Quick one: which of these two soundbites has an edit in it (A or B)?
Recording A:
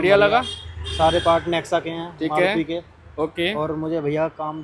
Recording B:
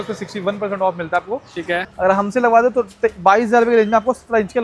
B